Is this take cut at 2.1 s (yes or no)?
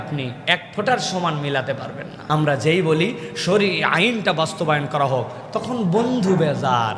yes